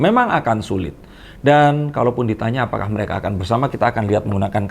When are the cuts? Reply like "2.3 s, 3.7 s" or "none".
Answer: none